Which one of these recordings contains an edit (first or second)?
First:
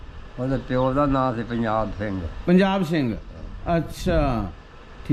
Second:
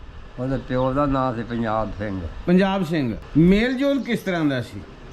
second